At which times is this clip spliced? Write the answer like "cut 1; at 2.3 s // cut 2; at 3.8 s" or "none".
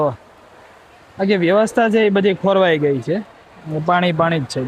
none